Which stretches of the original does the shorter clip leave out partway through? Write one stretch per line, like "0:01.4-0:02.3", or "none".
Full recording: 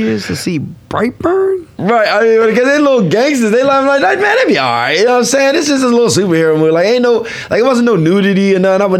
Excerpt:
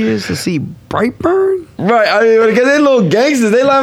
none